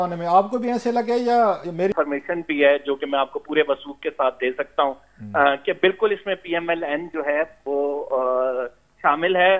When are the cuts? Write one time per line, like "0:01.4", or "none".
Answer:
0:01.9